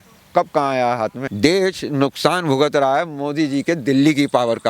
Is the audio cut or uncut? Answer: cut